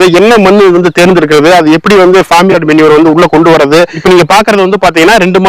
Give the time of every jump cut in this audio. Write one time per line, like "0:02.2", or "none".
0:04.0